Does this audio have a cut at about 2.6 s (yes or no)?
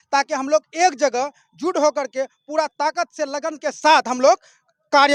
no